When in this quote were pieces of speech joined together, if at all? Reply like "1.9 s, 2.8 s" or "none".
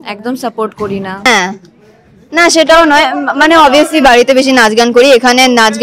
1.3 s

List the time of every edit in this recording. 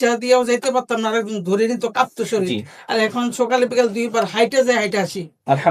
none

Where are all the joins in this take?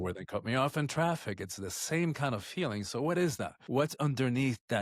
3.5 s

